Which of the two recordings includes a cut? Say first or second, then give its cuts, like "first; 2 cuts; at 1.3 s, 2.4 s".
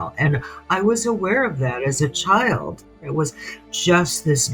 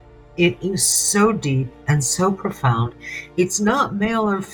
first; 1 cut; at 3.0 s